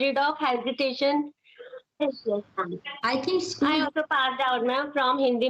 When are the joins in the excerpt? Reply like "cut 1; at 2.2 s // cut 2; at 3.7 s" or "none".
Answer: cut 1; at 2.0 s